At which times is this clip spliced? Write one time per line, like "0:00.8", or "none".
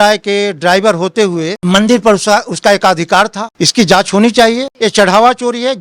0:03.5
0:04.7